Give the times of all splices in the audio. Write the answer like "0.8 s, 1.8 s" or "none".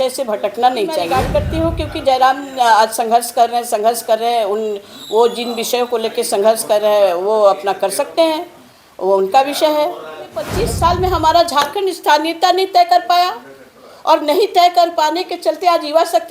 1.2 s, 10.6 s

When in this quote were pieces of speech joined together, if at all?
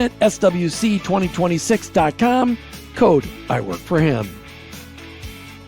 4.4 s

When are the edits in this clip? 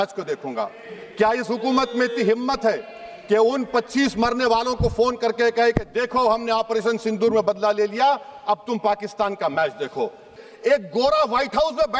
10.4 s

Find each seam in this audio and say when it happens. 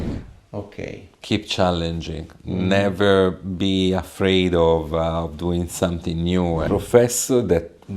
6.6 s

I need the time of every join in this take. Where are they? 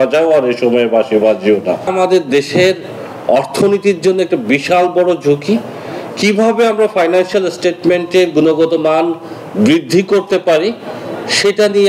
1.9 s

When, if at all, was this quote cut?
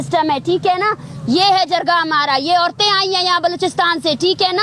none

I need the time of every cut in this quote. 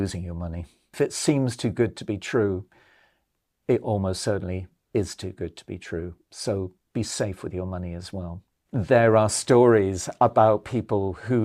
0.9 s, 8.6 s

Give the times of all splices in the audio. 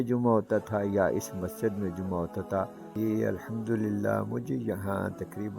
2.8 s

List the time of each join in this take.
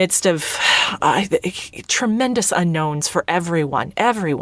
none

